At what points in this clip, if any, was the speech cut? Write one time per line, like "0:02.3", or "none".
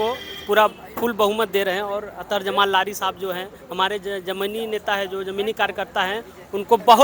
none